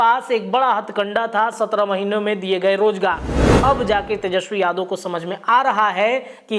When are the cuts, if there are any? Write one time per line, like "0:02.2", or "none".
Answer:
0:03.4